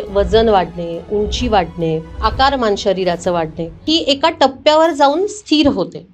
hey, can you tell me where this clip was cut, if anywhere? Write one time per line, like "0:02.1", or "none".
0:02.2
0:03.8